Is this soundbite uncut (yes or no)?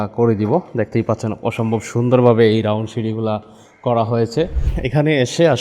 no